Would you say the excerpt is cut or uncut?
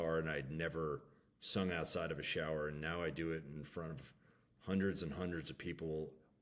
uncut